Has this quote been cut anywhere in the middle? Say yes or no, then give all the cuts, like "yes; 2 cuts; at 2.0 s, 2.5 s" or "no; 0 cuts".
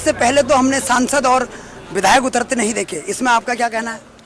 no; 0 cuts